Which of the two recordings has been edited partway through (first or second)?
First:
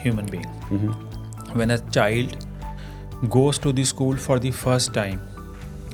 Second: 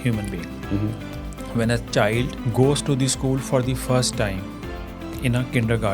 second